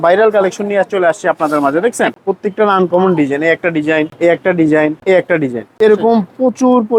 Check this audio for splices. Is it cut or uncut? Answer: cut